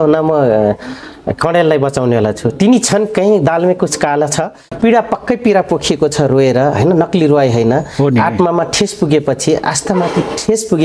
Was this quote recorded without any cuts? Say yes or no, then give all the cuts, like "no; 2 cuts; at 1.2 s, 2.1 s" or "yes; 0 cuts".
no; 1 cut; at 4.7 s